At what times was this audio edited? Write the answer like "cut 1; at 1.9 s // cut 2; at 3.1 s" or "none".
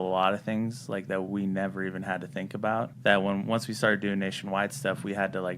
cut 1; at 2.9 s